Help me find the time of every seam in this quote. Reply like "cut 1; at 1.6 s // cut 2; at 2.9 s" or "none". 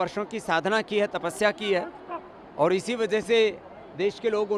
none